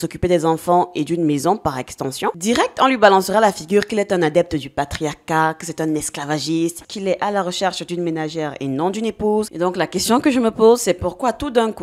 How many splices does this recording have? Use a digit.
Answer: 1